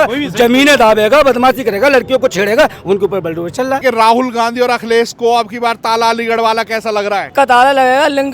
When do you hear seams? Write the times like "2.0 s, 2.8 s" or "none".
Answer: 3.8 s, 7.3 s